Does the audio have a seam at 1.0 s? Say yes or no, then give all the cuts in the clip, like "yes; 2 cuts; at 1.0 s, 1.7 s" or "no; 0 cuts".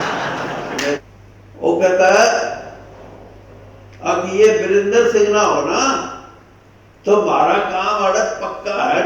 yes; 1 cut; at 1.0 s